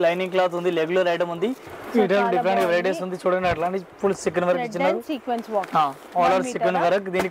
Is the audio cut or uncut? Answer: cut